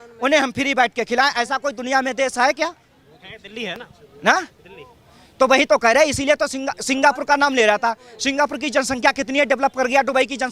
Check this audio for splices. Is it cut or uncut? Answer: uncut